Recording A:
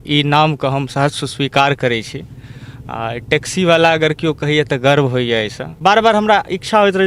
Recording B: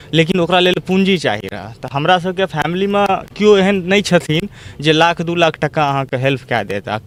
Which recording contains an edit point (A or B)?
A